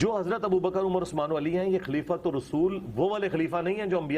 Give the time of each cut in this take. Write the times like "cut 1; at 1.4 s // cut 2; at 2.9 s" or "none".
none